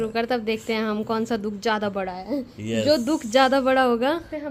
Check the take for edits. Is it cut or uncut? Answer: uncut